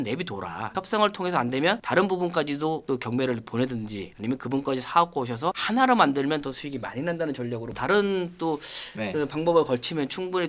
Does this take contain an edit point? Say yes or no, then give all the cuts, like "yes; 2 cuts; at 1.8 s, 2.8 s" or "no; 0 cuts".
yes; 1 cut; at 7.7 s